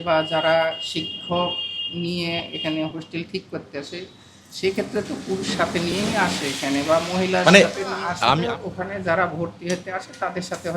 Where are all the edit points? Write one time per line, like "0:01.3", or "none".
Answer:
0:08.4

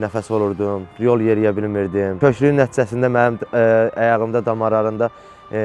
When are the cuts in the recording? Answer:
none

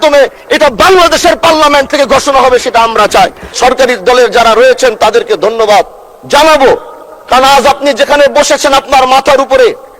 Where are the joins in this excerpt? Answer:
0:03.5

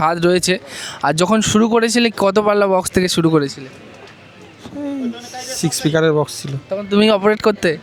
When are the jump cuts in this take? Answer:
none

